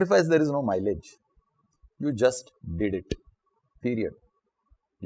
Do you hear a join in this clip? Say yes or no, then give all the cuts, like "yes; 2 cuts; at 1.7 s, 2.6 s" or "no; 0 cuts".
no; 0 cuts